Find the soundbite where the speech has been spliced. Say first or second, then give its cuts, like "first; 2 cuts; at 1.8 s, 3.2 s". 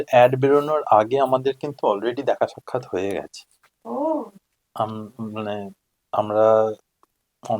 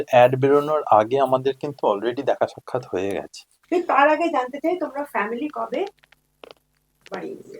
second; 1 cut; at 3.5 s